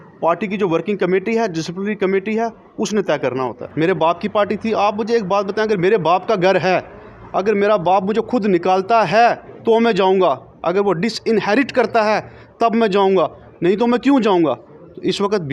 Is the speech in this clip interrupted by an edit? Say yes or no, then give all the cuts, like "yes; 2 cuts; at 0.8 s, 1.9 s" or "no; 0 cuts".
yes; 1 cut; at 3.6 s